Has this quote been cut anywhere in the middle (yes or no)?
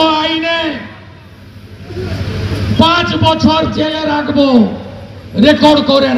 no